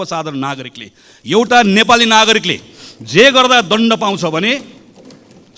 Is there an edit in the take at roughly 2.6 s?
no; 0 cuts

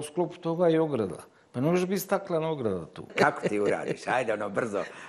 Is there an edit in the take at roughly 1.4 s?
no; 1 cut; at 3.1 s

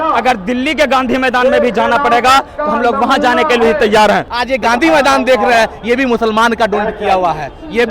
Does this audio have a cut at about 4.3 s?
yes; 1 cut; at 4.3 s

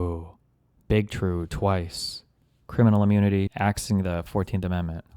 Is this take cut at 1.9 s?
no; 1 cut; at 3.5 s

